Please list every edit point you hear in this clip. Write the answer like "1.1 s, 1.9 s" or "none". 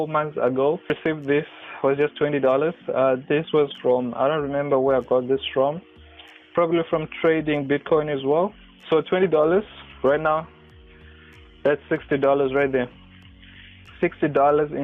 1.0 s